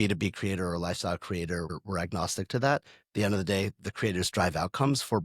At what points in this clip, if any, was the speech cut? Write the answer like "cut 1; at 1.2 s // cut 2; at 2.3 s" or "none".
cut 1; at 1.7 s